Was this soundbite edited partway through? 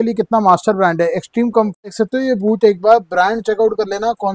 yes; 1 cut; at 1.9 s

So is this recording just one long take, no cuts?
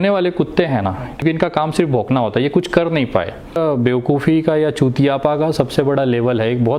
no; 2 cuts; at 1.2 s, 3.6 s

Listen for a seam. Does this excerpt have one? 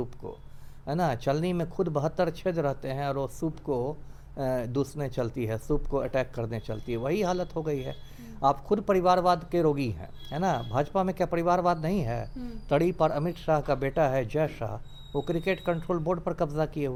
no; 0 cuts

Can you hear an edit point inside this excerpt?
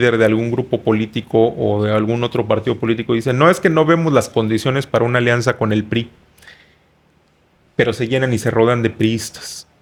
no; 0 cuts

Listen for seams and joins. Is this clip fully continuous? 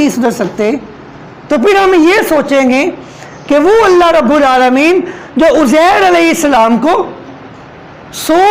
yes; 0 cuts

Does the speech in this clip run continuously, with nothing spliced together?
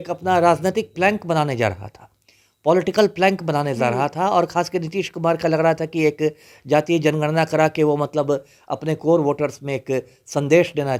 yes; 0 cuts

